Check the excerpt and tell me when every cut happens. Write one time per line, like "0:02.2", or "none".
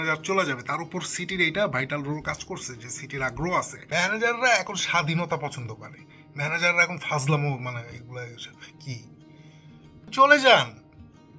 0:03.8
0:09.5